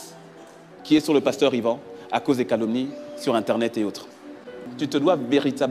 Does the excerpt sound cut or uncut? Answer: cut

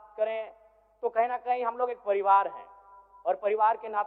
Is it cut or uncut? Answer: uncut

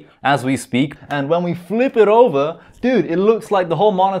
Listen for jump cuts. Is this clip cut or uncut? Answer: cut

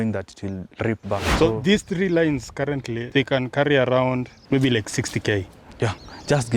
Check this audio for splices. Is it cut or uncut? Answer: cut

